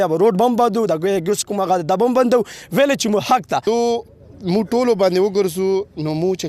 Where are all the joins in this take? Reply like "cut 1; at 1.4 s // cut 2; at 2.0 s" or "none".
cut 1; at 3.6 s